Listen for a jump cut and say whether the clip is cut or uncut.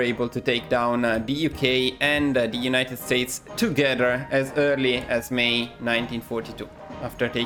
uncut